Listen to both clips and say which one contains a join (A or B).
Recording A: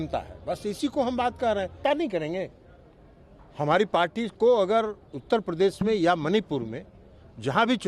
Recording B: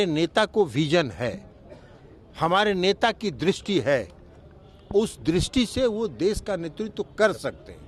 A